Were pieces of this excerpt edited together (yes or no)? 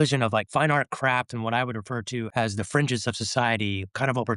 yes